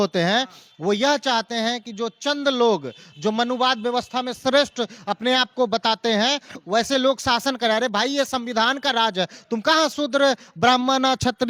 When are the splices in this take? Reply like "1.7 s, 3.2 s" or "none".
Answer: none